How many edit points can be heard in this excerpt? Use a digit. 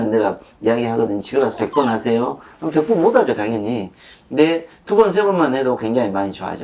0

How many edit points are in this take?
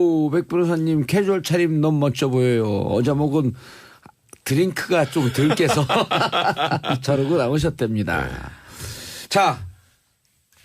1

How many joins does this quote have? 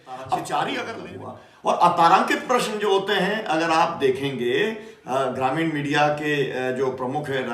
1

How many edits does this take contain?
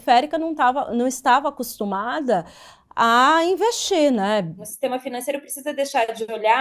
1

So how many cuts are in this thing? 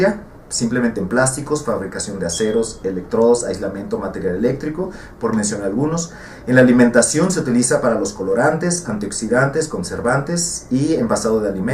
1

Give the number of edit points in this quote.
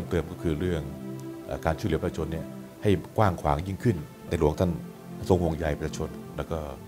1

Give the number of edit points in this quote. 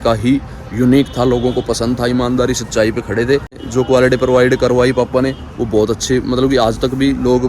1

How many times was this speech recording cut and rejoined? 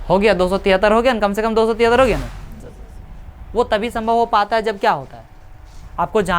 1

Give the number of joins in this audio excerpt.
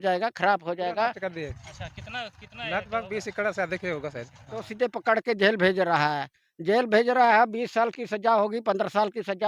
2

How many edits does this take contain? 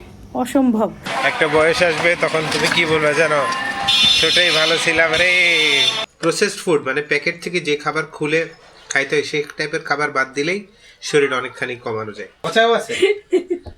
3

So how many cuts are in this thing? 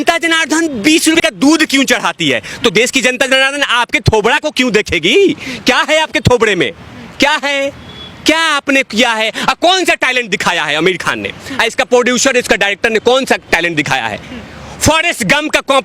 1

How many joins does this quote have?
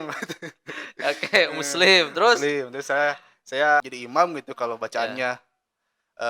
1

